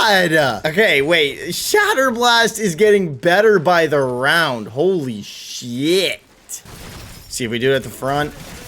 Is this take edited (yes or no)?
yes